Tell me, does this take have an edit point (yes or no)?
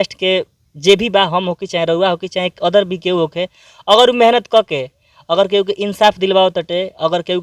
no